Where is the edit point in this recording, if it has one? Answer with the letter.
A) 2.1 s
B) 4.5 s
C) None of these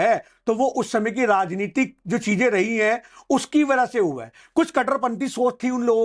C